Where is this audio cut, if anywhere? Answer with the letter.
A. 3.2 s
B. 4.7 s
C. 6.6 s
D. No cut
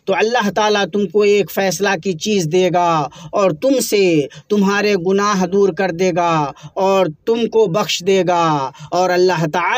D